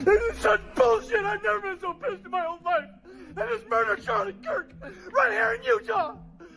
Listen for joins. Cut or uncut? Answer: cut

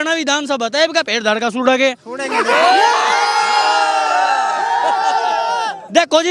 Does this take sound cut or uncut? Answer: uncut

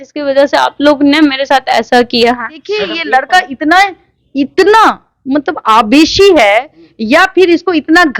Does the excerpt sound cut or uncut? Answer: cut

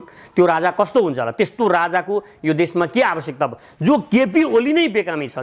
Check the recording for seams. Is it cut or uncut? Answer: uncut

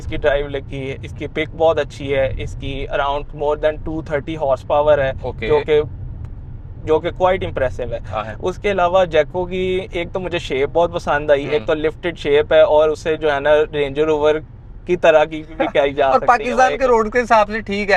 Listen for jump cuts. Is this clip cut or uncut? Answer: uncut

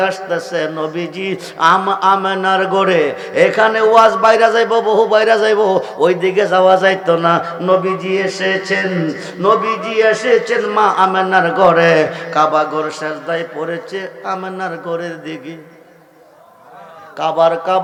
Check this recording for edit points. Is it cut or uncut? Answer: uncut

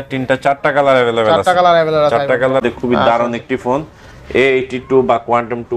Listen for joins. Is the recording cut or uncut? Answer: cut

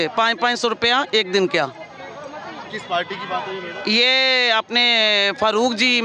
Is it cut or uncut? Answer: uncut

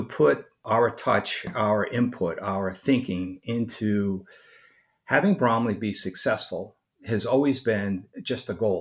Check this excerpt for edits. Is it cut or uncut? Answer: uncut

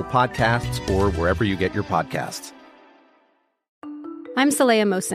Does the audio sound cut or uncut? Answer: cut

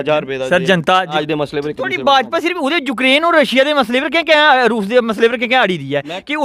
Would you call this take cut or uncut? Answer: cut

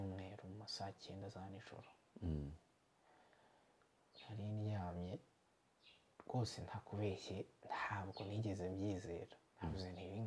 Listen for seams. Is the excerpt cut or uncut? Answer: uncut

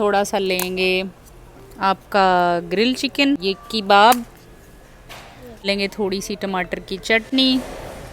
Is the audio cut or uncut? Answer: cut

